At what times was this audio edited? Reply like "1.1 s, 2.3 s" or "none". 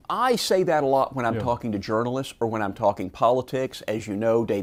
none